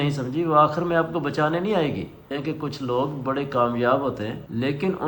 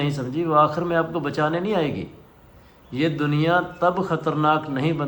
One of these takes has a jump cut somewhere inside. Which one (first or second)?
first